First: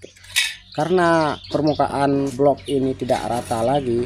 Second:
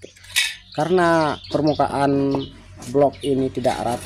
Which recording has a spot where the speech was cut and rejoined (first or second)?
first